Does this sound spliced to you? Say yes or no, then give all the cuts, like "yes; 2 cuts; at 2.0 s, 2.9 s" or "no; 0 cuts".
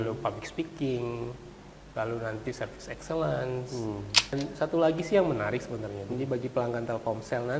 yes; 1 cut; at 4.3 s